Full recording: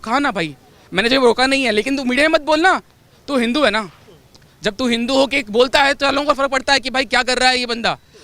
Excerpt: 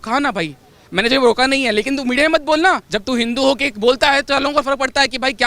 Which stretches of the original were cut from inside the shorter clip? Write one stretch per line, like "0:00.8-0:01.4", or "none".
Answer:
0:02.9-0:04.6